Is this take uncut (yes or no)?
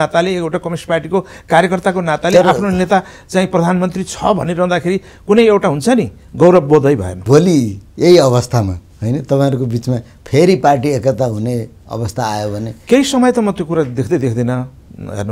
no